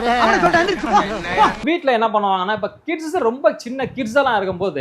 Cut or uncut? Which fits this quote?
cut